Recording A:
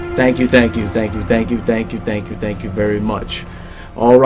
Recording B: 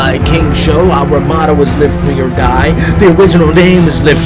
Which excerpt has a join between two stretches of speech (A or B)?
A